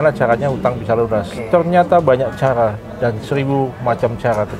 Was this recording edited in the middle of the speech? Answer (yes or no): no